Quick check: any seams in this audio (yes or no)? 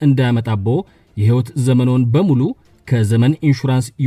no